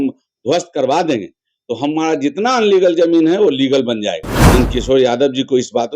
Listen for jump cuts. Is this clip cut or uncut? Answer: cut